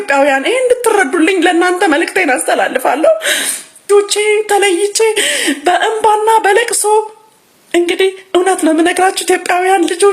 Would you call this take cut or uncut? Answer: cut